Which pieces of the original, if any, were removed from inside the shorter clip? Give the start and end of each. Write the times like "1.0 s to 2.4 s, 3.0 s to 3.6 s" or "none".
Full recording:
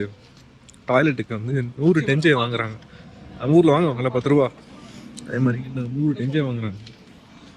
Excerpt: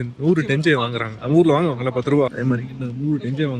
2.7 s to 3.3 s, 4.5 s to 5.3 s